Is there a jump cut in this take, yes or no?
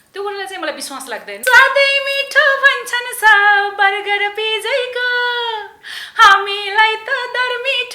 yes